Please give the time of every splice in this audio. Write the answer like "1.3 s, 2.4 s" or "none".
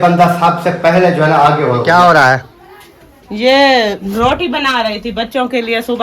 1.8 s